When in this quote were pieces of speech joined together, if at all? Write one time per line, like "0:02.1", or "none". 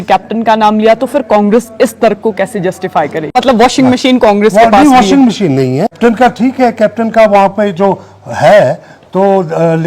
0:03.4
0:05.9